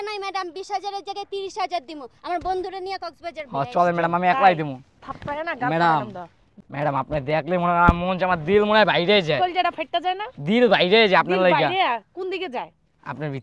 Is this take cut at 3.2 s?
no; 1 cut; at 6.5 s

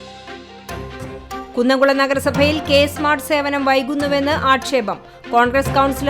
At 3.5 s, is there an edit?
no; 1 cut; at 1.4 s

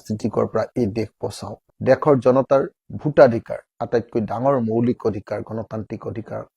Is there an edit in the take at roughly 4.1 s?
no; 1 cut; at 1.6 s

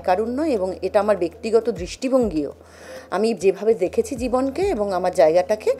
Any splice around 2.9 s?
no; 0 cuts

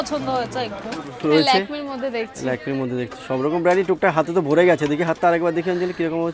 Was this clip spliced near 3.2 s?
no; 1 cut; at 1.1 s

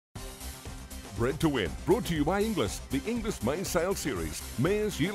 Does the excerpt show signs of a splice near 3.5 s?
no; 1 cut; at 1.1 s

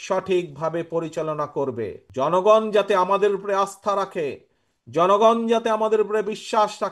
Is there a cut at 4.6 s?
no; 1 cut; at 2.0 s

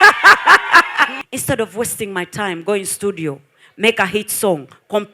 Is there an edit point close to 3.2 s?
no; 1 cut; at 1.2 s

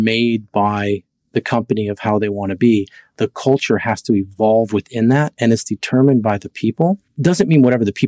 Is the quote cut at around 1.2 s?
no; 1 cut; at 7.1 s

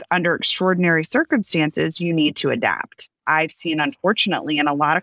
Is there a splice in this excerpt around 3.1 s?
yes; 1 cut; at 3.1 s

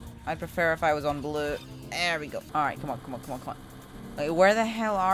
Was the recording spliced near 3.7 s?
no; 1 cut; at 2.5 s

